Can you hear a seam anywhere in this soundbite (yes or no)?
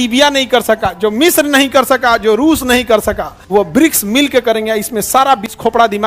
yes